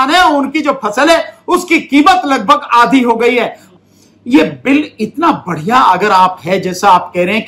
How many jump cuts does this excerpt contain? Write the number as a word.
one